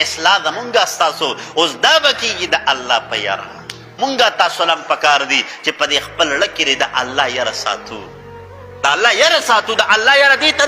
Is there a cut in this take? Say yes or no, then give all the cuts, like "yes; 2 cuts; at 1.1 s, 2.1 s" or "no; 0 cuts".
yes; 1 cut; at 3.9 s